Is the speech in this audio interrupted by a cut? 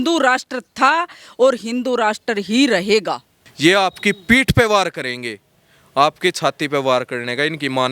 yes; 1 cut; at 3.4 s

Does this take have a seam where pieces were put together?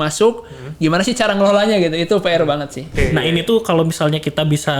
yes; 1 cut; at 2.8 s

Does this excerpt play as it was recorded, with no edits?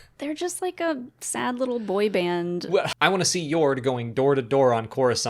no; 1 cut; at 2.9 s

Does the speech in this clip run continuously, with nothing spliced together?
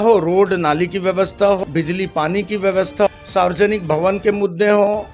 no; 2 cuts; at 1.6 s, 3.1 s

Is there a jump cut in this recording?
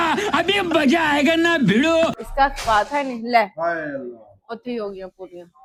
no; 0 cuts

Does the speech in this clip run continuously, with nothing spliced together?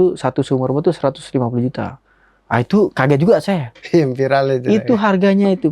yes; 0 cuts

